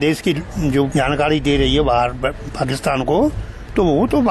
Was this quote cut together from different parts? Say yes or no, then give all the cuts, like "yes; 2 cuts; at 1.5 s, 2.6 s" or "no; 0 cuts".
yes; 1 cut; at 0.9 s